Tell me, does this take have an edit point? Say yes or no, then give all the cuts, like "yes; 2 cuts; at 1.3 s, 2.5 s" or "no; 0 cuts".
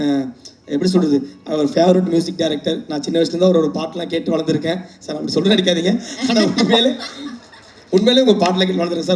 no; 0 cuts